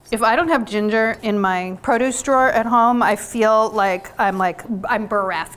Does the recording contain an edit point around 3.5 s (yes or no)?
no